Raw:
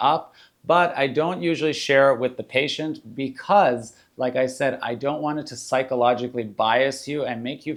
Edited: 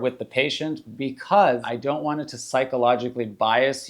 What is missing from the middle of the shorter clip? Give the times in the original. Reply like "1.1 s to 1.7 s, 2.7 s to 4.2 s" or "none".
3.9 s to 4.9 s